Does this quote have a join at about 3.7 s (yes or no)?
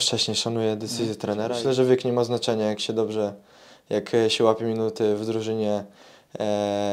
no